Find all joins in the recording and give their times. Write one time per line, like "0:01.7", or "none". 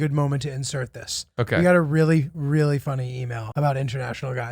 0:03.3